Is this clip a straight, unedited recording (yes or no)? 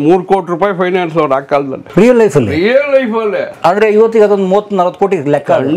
no